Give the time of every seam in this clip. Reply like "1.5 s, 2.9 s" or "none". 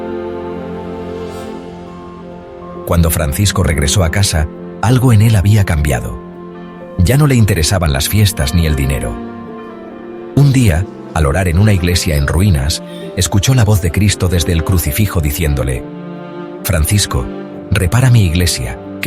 2.9 s